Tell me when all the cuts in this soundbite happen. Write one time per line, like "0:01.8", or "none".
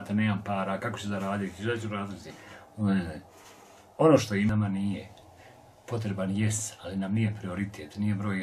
0:04.5